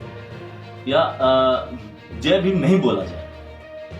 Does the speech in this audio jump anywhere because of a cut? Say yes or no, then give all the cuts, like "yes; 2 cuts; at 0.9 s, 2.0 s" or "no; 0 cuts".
yes; 1 cut; at 3.1 s